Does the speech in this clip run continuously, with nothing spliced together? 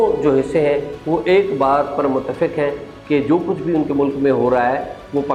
yes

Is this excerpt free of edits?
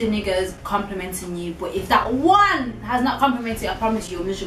yes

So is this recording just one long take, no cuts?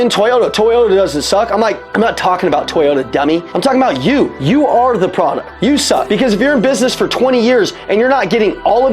no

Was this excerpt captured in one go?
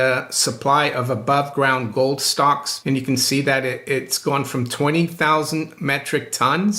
no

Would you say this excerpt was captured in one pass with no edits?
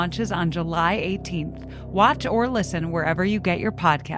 yes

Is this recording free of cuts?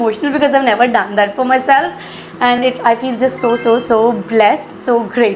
yes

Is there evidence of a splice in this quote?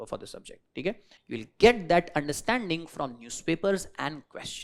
yes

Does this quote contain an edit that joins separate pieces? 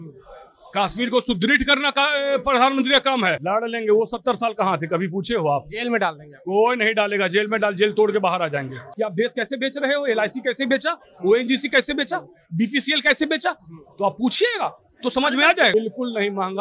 yes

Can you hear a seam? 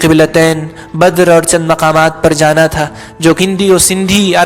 yes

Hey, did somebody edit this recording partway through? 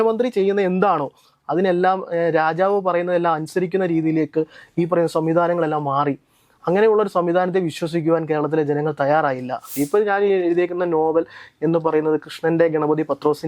yes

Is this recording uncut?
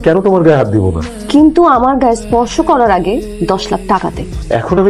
yes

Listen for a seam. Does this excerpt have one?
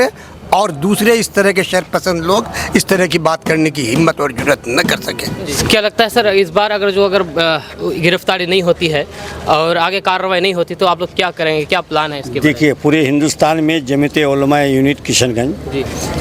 no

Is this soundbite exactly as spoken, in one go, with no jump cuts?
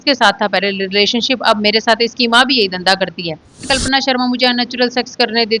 no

